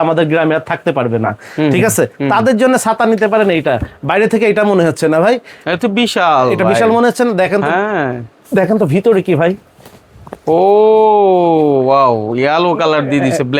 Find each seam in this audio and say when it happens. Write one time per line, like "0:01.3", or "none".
none